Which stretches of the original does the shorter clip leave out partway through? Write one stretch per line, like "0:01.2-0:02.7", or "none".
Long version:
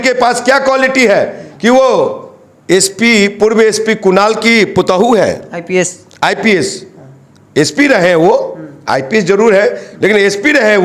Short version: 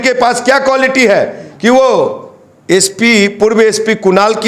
none